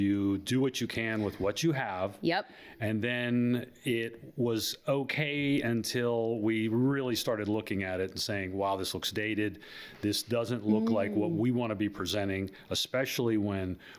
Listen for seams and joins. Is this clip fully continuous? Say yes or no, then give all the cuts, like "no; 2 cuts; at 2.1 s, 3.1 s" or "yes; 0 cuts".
yes; 0 cuts